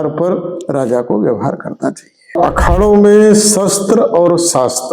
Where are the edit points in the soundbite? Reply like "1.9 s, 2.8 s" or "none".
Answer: 2.4 s